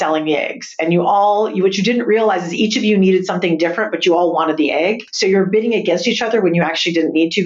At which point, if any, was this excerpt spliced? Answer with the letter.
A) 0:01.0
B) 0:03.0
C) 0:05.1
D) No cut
C